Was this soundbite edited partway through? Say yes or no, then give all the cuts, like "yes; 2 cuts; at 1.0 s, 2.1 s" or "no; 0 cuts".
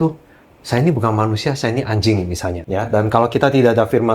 yes; 1 cut; at 2.6 s